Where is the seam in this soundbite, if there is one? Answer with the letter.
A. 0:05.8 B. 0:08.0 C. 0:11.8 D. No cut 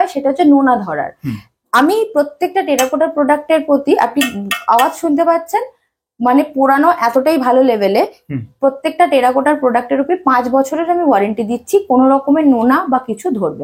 D